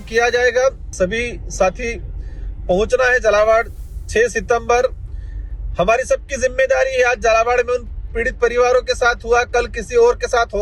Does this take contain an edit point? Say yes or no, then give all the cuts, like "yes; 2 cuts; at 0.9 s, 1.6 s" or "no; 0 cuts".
yes; 1 cut; at 0.9 s